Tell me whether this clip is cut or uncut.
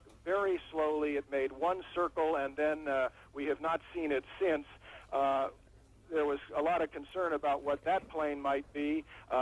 uncut